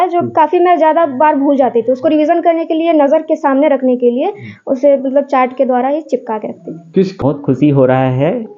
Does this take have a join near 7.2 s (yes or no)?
yes